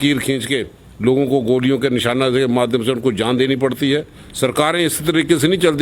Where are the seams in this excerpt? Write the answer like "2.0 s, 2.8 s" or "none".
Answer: 4.2 s